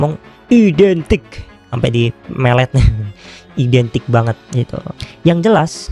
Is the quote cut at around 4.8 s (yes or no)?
yes